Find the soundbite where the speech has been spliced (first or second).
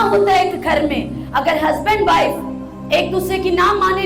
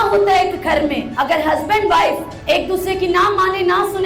second